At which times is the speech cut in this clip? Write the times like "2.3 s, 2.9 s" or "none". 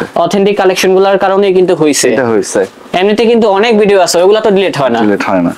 none